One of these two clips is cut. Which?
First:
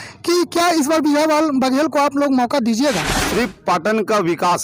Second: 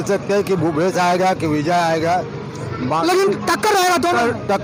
first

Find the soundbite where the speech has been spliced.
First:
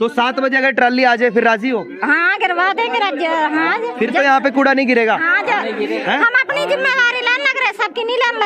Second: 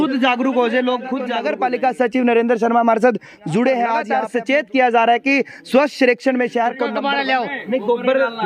second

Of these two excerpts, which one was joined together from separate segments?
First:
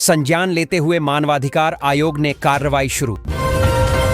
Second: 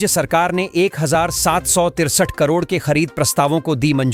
first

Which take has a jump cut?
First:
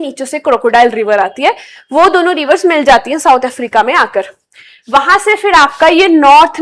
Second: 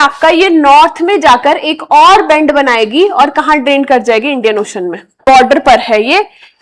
second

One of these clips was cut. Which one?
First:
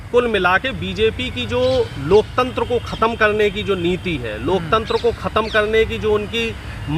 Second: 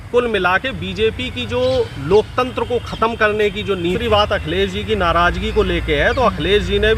second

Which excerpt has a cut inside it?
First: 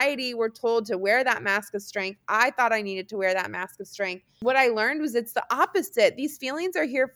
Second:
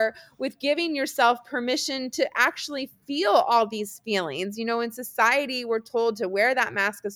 first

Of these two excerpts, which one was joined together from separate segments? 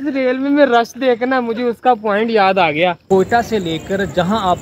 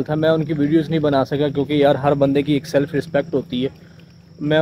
first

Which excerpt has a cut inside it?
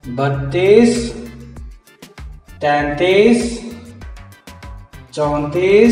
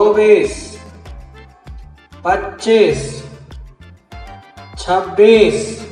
second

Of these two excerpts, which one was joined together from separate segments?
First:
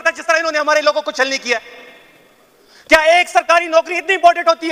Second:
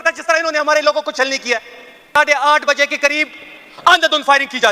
second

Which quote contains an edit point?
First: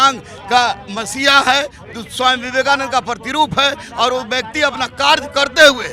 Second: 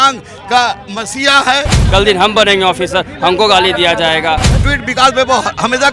second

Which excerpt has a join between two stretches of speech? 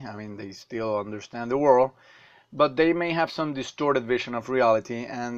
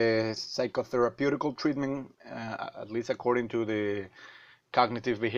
first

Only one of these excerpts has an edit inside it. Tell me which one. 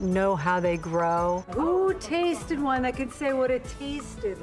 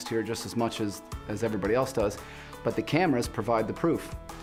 first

